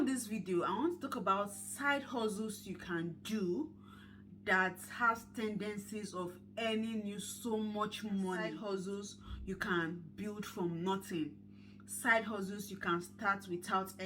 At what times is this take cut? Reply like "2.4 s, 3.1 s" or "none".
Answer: 8.6 s